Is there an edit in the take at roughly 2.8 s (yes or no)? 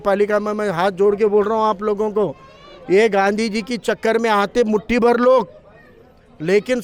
no